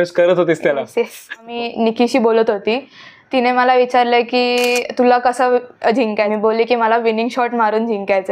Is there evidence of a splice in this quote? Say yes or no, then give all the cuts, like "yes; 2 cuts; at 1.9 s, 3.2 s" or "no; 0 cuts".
yes; 2 cuts; at 1.5 s, 6.3 s